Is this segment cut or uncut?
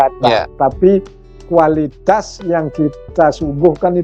uncut